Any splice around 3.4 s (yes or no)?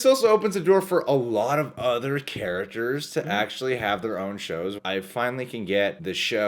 no